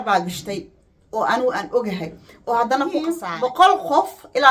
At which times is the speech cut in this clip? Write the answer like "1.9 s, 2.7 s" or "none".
3.1 s